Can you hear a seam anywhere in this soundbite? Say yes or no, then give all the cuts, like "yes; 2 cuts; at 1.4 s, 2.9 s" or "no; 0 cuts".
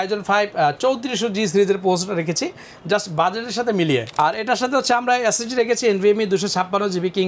yes; 1 cut; at 4.1 s